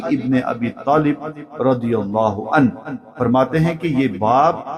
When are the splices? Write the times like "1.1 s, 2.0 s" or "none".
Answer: none